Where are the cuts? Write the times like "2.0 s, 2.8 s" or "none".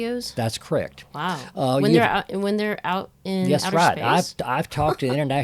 none